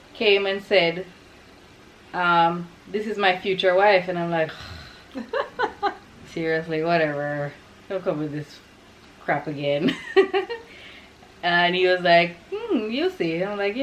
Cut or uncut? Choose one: uncut